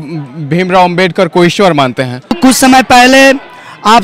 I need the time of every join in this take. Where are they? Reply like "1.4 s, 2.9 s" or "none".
2.4 s